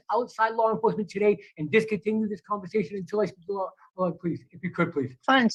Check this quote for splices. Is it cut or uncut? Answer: uncut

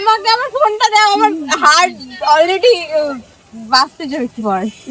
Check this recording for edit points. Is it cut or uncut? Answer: uncut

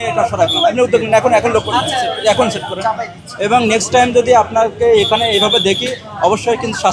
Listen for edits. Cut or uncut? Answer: uncut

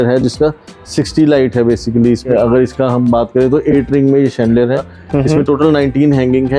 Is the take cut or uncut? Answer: cut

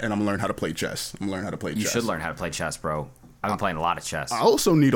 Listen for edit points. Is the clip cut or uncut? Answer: uncut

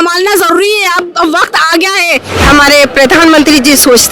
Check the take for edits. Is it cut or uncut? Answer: cut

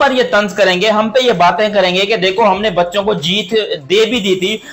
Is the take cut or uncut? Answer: uncut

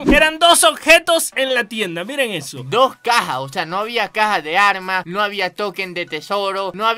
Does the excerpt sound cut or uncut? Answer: uncut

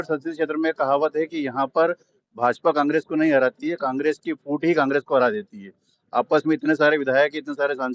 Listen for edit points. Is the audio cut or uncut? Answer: uncut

